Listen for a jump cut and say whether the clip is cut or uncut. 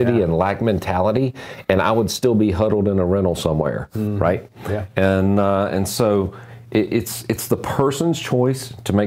uncut